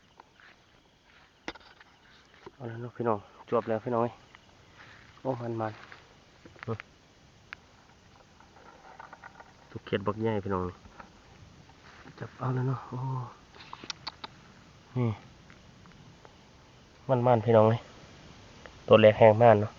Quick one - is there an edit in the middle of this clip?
no; 0 cuts

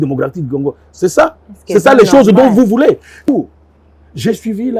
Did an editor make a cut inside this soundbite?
yes; 1 cut; at 3.3 s

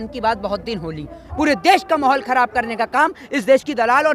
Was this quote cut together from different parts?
yes; 1 cut; at 1.3 s

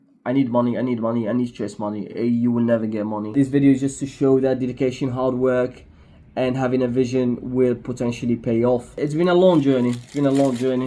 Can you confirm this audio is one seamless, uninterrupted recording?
no; 2 cuts; at 3.2 s, 8.9 s

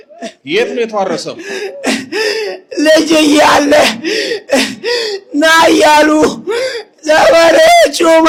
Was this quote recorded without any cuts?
yes; 0 cuts

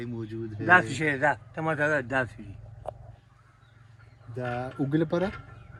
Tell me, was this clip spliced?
no; 0 cuts

